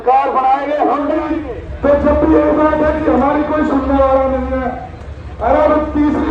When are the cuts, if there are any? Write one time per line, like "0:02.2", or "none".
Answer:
0:01.2